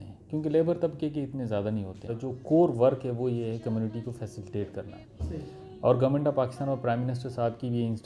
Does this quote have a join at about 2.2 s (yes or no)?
yes